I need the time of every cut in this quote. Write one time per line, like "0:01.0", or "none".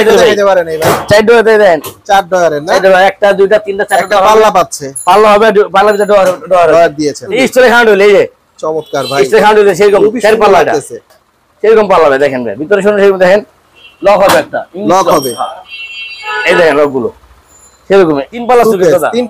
0:07.3
0:18.4

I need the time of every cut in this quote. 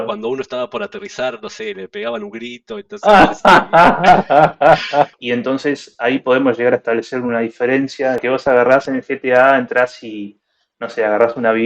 0:05.2
0:08.2

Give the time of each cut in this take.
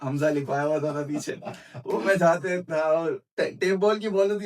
none

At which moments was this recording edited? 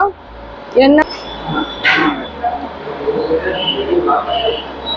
0:01.0

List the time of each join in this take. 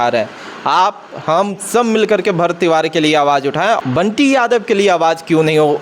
0:03.8

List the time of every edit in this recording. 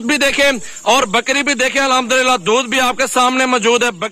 none

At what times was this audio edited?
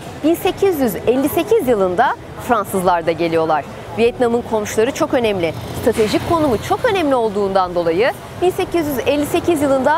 none

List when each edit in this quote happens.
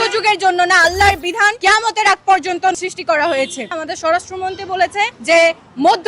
0:01.6
0:02.8
0:03.7
0:05.2

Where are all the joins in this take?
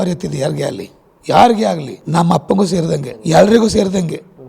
0:01.9
0:03.1

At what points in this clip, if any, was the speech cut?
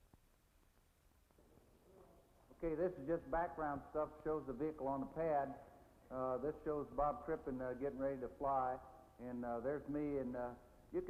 none

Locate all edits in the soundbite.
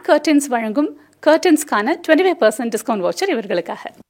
none

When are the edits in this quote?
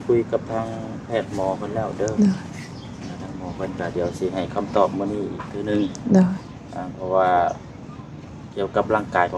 none

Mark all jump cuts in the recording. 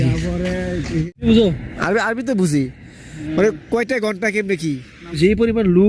0:01.0
0:05.2

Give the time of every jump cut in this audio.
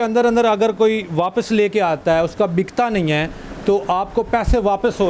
none

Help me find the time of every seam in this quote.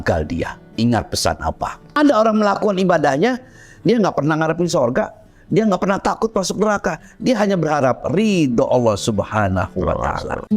0:01.9

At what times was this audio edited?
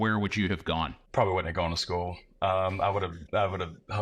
0:01.0

